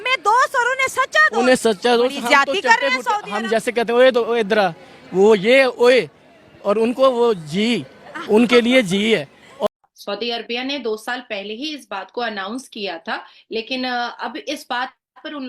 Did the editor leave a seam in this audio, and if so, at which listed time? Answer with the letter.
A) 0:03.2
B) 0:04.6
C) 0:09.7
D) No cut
C